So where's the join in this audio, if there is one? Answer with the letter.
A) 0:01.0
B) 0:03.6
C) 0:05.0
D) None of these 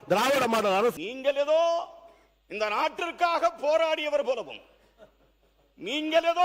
A